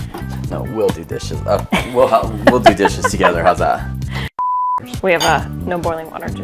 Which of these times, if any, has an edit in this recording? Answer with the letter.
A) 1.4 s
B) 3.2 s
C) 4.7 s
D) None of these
C